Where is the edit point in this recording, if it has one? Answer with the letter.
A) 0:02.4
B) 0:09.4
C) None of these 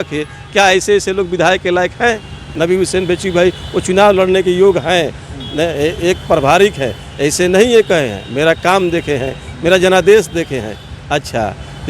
A